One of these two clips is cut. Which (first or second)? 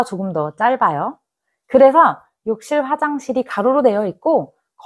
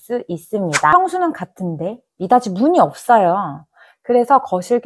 second